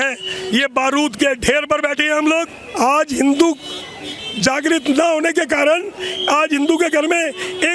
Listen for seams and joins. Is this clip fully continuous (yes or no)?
no